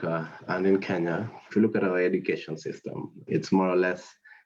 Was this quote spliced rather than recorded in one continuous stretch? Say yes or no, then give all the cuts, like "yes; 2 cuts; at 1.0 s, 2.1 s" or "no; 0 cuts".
yes; 1 cut; at 1.5 s